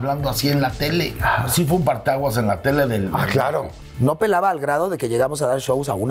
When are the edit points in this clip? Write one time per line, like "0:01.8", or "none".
0:01.5
0:03.8